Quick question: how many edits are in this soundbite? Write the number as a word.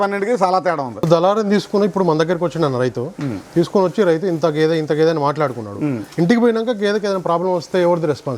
one